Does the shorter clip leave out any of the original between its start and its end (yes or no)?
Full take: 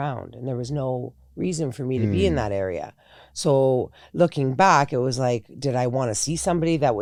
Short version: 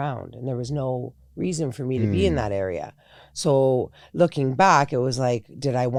no